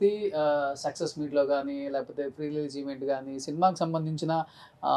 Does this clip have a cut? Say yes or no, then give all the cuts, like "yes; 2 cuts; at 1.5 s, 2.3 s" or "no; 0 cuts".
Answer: no; 0 cuts